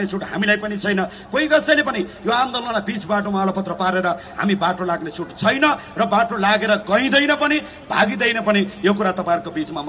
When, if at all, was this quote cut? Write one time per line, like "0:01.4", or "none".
none